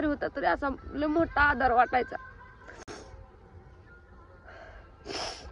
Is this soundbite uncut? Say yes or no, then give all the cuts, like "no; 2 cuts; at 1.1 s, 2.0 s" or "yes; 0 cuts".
yes; 0 cuts